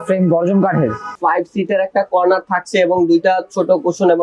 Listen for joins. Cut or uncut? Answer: cut